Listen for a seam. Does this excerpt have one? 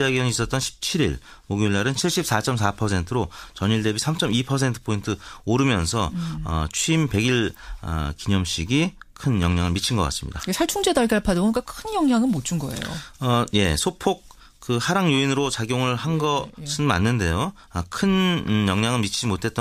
yes; 1 cut; at 3.7 s

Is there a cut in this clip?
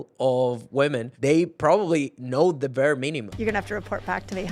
yes; 2 cuts; at 1.1 s, 3.3 s

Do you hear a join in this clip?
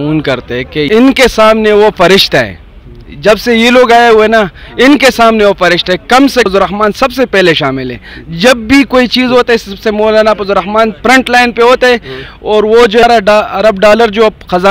yes; 3 cuts; at 0.9 s, 6.5 s, 13.0 s

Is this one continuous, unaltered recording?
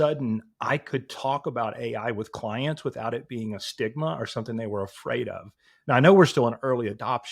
yes; 0 cuts

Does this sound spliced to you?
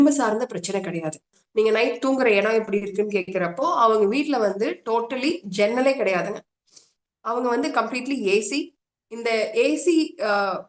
yes; 1 cut; at 1.3 s

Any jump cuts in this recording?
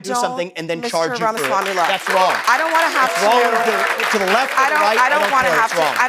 no; 0 cuts

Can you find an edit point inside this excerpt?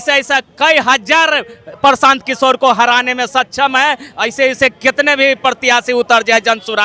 no; 0 cuts

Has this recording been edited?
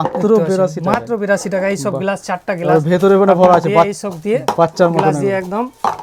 no; 0 cuts

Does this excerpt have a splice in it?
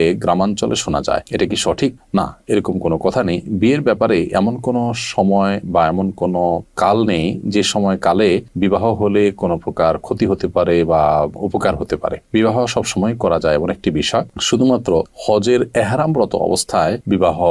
no; 0 cuts

